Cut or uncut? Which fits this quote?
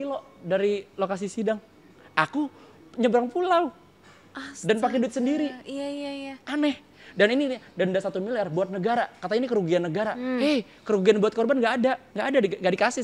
cut